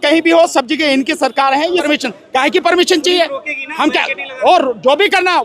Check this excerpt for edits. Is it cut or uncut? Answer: cut